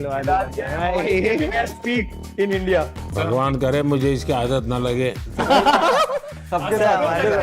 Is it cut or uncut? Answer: uncut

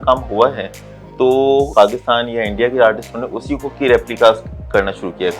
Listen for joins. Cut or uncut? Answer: cut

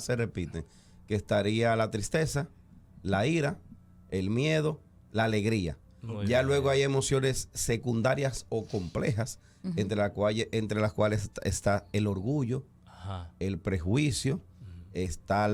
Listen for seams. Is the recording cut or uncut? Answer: uncut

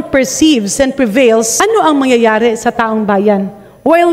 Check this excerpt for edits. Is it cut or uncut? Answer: cut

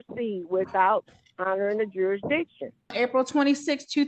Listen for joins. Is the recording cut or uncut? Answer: cut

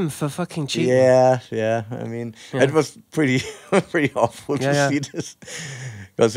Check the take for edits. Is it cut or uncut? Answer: uncut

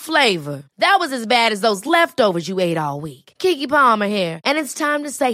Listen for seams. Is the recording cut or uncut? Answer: uncut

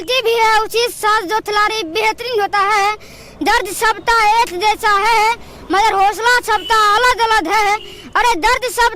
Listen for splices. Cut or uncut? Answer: uncut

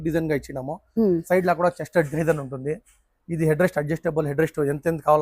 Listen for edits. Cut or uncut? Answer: uncut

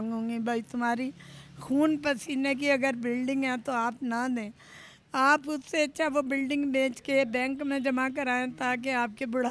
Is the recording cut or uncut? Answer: uncut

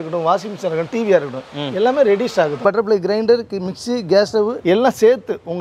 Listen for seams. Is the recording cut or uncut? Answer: cut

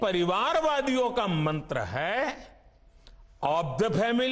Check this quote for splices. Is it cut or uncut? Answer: uncut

